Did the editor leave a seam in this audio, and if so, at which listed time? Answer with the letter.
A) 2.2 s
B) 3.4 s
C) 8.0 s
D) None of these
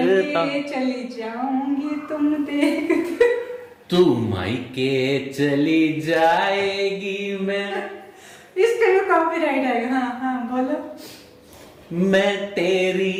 D